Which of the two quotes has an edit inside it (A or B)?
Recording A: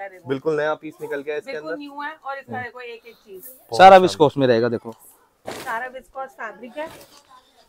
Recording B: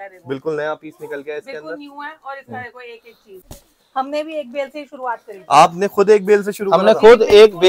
B